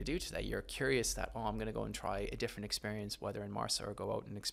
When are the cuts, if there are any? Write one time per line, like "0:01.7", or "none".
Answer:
none